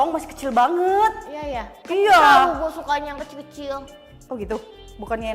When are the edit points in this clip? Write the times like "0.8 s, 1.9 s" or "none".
none